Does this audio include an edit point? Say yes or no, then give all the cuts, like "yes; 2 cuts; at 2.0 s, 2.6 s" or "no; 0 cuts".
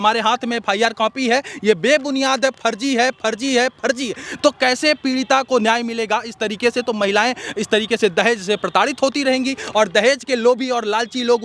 no; 0 cuts